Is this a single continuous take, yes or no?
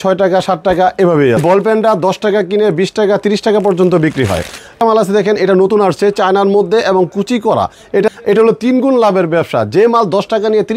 no